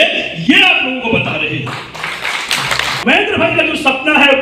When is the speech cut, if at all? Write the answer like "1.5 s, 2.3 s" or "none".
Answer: 2.9 s